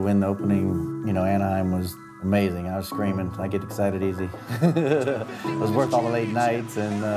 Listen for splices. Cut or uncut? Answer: cut